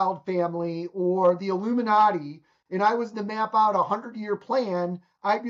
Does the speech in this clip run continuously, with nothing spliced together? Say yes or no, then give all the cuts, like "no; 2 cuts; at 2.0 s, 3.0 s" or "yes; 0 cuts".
yes; 0 cuts